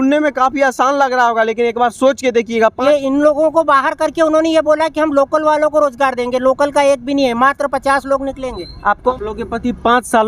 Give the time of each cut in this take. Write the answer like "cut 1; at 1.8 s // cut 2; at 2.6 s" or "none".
cut 1; at 2.8 s // cut 2; at 9.1 s